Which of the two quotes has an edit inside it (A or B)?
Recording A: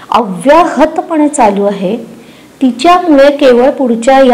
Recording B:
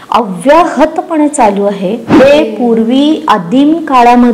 B